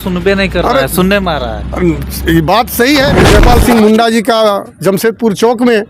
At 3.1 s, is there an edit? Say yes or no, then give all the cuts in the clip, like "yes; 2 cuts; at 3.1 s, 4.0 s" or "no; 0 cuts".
yes; 1 cut; at 3.1 s